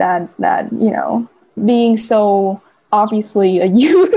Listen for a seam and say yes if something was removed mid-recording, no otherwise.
yes